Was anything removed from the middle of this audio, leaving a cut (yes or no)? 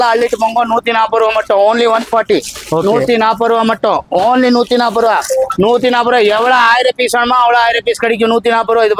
no